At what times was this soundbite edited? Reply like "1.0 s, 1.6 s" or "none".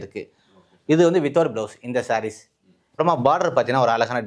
3.0 s